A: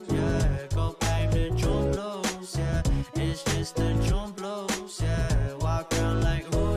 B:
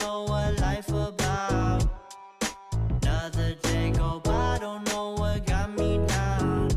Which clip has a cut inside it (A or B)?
A